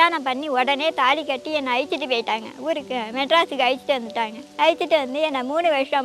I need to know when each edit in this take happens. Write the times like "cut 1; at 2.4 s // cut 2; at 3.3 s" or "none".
cut 1; at 4.4 s